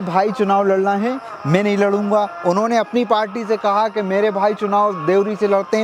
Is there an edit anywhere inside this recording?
no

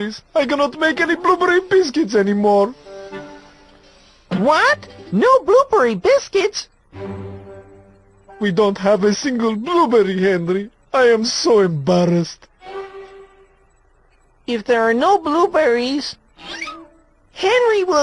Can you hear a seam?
no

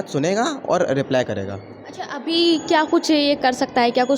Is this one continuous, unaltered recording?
yes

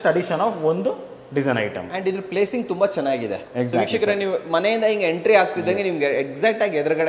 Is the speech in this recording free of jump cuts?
yes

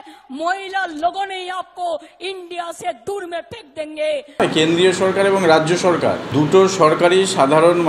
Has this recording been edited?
yes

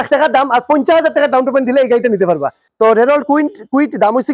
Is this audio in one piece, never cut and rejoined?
no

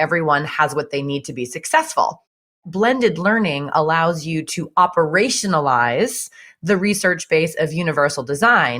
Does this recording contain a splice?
yes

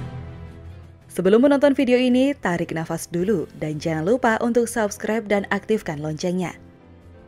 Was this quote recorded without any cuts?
yes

